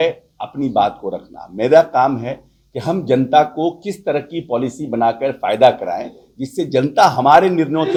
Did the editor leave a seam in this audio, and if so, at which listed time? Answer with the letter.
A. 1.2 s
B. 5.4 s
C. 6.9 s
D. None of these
D